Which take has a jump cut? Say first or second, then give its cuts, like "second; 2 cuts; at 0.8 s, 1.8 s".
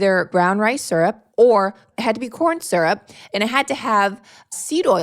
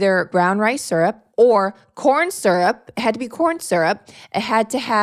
first; 2 cuts; at 1.9 s, 3.1 s